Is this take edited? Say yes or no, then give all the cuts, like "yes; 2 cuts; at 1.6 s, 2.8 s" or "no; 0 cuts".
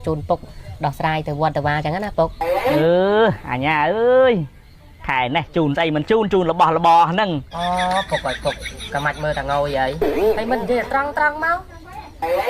yes; 1 cut; at 7.5 s